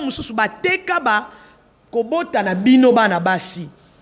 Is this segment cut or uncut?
uncut